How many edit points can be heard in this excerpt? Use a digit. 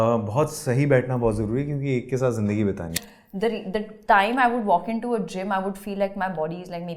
1